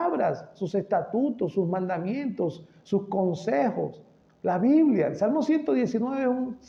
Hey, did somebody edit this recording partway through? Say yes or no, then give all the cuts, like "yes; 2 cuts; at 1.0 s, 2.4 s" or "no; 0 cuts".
no; 0 cuts